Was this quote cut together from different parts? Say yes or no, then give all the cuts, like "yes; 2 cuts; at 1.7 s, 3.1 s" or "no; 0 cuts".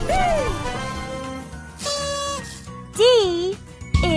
no; 0 cuts